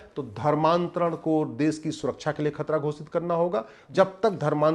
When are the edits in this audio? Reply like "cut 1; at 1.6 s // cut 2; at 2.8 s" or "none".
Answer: cut 1; at 3.8 s